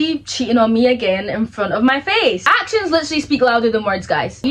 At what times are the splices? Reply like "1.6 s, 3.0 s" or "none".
2.4 s

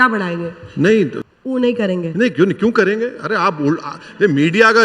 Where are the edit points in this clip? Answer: 1.0 s

